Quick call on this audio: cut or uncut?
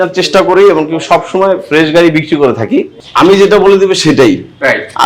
cut